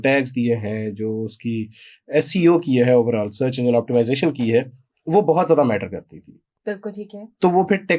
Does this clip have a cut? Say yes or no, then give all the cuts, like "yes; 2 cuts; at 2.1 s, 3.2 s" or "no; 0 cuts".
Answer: no; 0 cuts